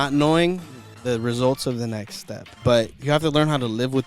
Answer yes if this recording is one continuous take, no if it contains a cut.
no